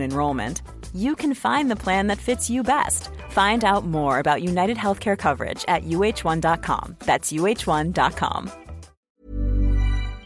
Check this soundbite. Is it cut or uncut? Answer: cut